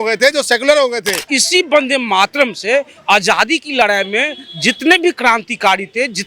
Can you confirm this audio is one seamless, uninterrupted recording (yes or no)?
no